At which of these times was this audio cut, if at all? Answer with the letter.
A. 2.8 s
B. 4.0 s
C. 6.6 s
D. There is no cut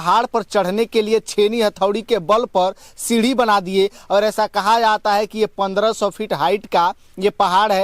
D